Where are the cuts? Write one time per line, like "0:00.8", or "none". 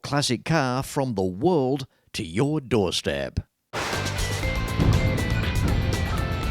0:03.6